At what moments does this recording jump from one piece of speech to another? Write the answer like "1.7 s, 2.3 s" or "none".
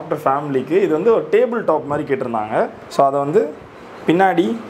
none